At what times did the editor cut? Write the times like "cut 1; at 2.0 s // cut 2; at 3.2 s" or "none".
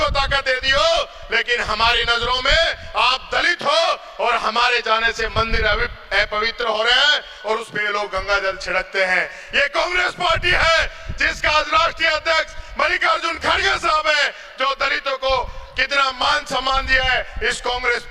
none